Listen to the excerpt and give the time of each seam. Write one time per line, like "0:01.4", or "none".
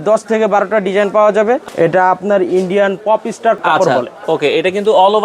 0:01.6
0:03.6